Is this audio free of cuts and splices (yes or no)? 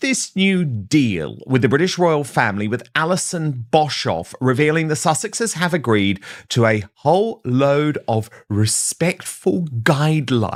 yes